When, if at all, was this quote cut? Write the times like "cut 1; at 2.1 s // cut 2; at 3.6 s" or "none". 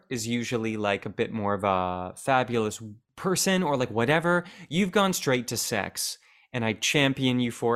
none

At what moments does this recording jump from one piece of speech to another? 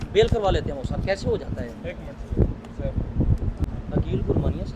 cut 1; at 3.8 s

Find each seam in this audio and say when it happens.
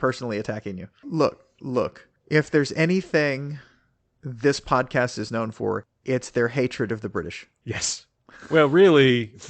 cut 1; at 1.0 s

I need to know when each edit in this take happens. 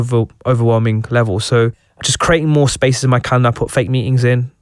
cut 1; at 2.1 s

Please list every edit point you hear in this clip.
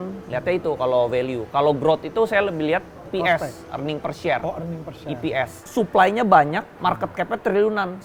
cut 1; at 3.0 s // cut 2; at 5.6 s // cut 3; at 6.7 s

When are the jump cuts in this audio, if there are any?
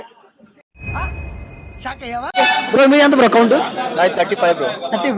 cut 1; at 2.3 s

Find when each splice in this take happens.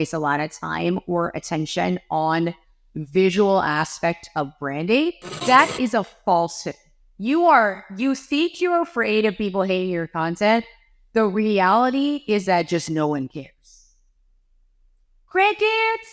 cut 1; at 5.3 s

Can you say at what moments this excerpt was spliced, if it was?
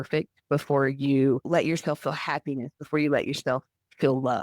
cut 1; at 1.4 s

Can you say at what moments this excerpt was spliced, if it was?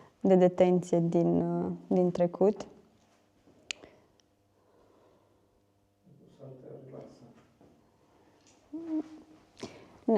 none

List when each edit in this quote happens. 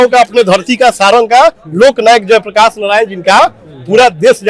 none

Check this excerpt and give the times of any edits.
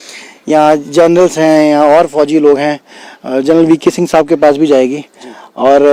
none

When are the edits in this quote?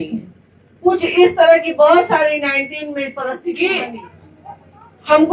cut 1; at 3.3 s

